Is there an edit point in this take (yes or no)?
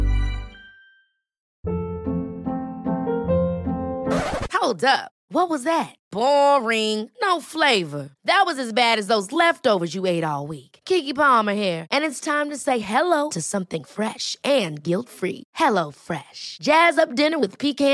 yes